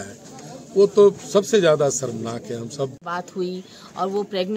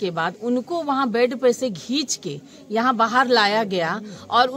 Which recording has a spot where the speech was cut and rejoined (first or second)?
first